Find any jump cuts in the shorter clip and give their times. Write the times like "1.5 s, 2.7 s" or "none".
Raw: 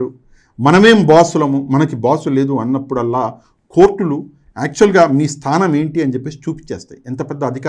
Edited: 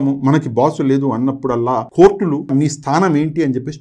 1.9 s, 2.5 s